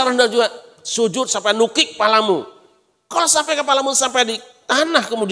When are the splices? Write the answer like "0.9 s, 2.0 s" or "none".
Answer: none